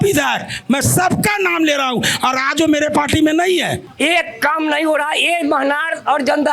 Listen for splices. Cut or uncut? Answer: cut